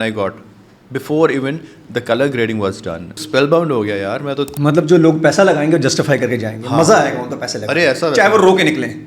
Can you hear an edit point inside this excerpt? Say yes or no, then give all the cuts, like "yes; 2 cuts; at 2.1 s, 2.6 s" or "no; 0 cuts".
yes; 2 cuts; at 3.2 s, 4.5 s